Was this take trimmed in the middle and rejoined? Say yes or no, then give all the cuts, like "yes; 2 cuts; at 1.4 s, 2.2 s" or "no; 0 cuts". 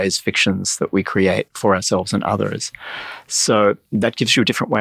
no; 0 cuts